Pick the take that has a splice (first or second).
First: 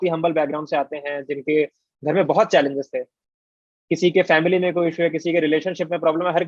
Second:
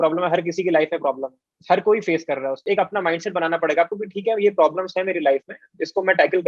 second